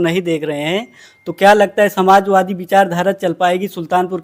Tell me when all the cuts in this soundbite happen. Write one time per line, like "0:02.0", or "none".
none

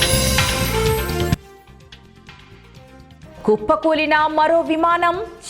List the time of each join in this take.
0:03.4

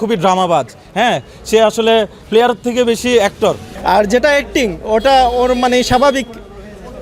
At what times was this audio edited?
0:03.7

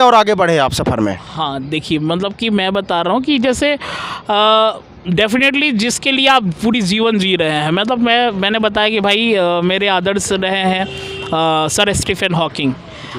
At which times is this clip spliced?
none

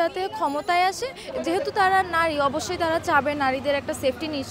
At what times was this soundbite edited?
0:01.2

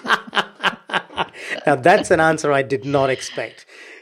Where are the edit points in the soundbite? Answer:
none

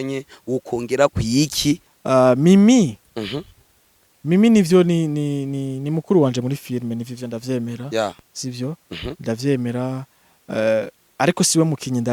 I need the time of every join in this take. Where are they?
0:01.9

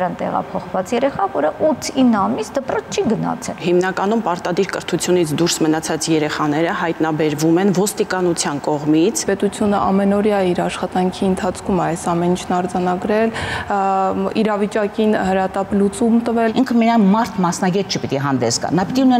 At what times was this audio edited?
0:03.6
0:09.2
0:16.5

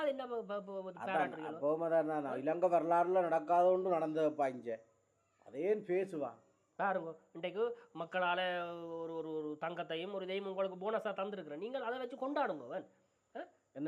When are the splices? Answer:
none

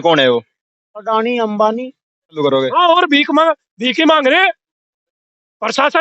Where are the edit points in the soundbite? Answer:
0:02.4

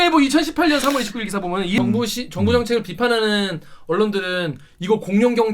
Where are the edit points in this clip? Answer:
0:01.8

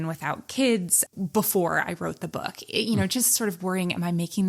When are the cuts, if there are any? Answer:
none

